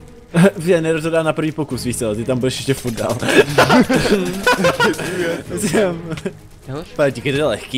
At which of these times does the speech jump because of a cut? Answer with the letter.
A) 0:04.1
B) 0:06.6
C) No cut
C